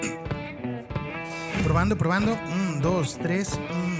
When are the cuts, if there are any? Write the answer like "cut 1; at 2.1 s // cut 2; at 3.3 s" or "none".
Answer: none